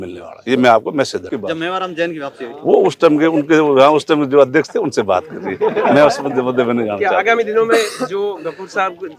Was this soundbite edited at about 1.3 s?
yes; 1 cut; at 1.3 s

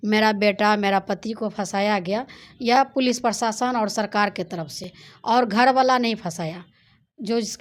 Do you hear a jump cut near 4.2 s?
no; 0 cuts

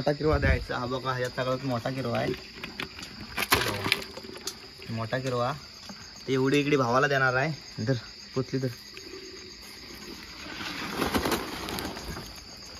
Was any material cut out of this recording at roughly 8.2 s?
no; 0 cuts

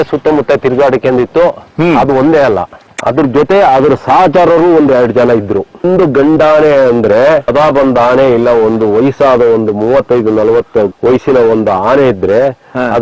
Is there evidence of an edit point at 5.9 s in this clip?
yes; 2 cuts; at 5.9 s, 7.5 s

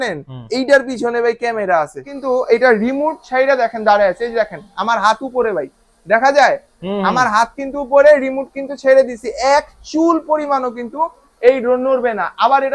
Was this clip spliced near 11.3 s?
no; 1 cut; at 2.1 s

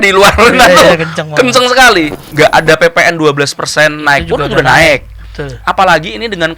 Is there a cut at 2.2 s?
yes; 1 cut; at 2.2 s

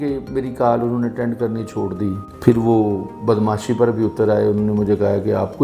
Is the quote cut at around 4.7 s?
no; 0 cuts

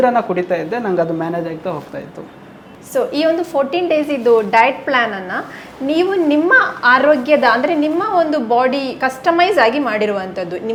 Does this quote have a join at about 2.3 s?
no; 0 cuts

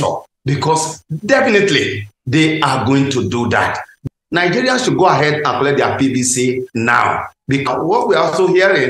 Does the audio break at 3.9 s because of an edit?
yes; 2 cuts; at 3.9 s, 7.7 s

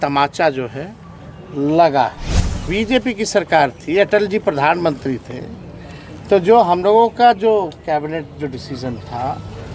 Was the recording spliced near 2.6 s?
yes; 1 cut; at 2.6 s

